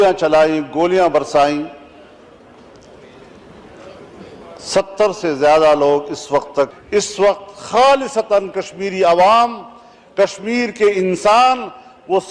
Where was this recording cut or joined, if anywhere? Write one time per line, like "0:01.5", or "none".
0:06.8